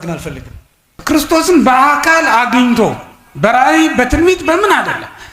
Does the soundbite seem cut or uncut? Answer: cut